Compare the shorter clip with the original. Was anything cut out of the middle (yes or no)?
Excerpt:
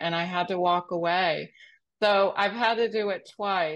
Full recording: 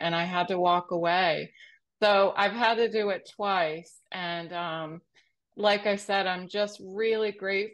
no